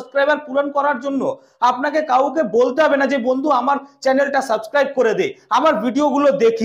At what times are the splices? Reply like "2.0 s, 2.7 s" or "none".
none